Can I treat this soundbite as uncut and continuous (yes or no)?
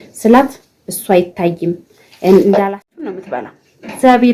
no